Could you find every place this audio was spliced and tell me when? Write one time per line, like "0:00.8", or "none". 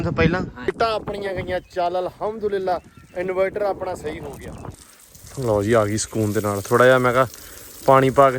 0:00.7
0:04.9